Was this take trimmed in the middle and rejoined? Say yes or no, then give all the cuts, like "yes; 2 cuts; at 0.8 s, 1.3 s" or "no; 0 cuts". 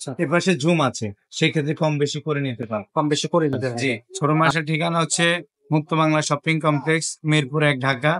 yes; 1 cut; at 4.1 s